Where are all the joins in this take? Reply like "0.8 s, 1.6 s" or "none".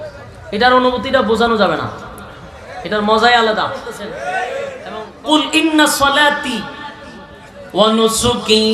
5.0 s